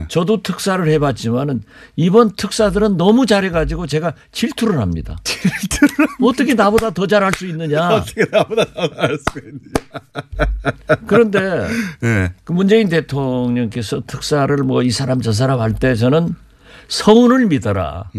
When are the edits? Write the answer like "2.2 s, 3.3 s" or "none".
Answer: none